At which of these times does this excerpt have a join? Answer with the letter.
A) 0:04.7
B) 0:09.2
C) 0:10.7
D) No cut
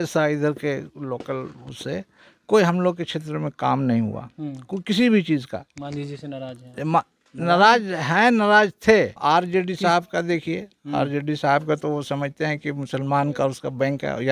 B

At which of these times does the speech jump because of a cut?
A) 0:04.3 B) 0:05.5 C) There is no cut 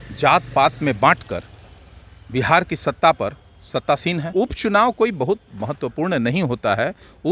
A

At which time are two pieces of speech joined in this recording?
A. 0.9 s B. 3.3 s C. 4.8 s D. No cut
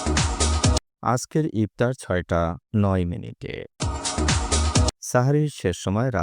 D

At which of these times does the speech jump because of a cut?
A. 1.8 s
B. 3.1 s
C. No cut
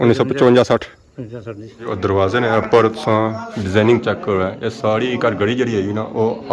A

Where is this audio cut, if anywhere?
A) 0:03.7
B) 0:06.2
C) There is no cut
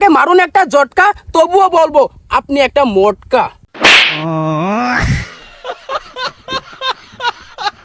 A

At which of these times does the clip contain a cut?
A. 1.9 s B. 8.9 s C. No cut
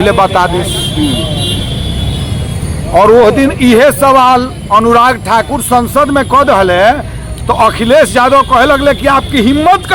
C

